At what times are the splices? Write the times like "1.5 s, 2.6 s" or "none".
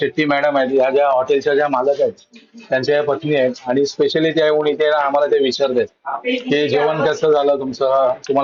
none